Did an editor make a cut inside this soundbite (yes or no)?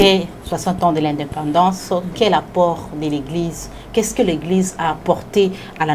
no